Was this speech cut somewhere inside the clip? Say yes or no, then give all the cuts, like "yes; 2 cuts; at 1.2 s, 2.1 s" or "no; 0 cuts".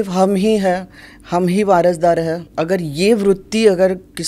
yes; 1 cut; at 2.5 s